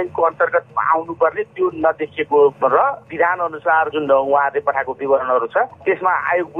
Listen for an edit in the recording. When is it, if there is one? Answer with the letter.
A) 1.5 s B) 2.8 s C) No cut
B